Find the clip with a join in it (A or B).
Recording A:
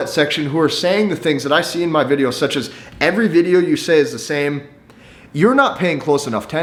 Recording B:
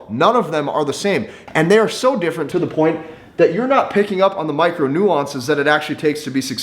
B